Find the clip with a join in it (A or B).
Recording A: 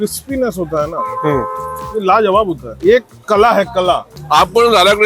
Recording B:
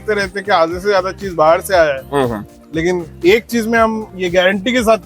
A